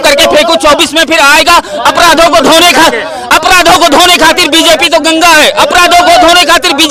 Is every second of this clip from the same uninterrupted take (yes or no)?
yes